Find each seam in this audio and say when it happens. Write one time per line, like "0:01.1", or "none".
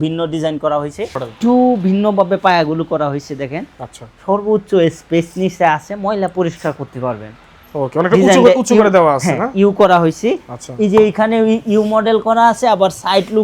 0:01.2